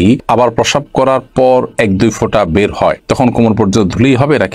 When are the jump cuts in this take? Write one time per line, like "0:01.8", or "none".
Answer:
none